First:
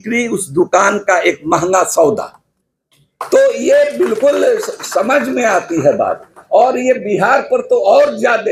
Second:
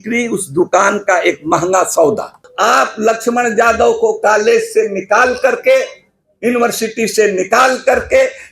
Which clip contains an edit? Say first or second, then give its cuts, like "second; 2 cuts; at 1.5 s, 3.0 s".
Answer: second; 1 cut; at 2.5 s